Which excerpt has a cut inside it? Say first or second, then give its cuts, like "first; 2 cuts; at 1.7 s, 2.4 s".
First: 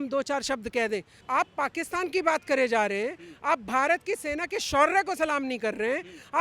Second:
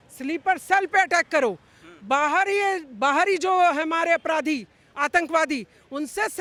first; 1 cut; at 1.2 s